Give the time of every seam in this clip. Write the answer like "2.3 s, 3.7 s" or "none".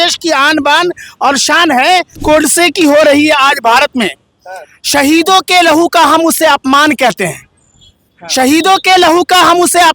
2.2 s

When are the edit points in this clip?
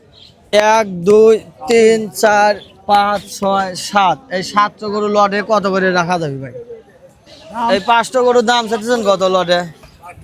7.7 s

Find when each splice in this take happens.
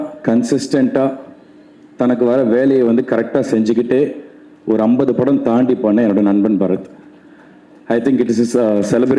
none

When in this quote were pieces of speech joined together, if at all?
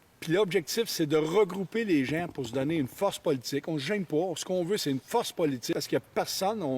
5.7 s

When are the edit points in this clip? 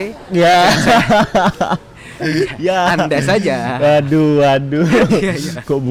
none

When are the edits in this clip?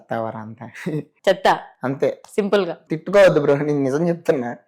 1.1 s, 2.8 s

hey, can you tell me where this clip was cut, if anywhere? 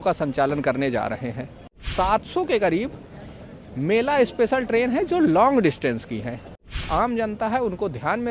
1.8 s, 6.6 s

